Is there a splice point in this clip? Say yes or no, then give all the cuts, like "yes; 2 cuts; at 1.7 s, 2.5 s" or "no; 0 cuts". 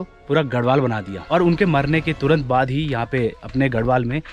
yes; 1 cut; at 1.1 s